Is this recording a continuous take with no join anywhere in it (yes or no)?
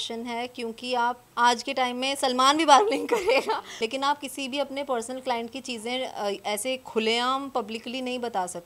no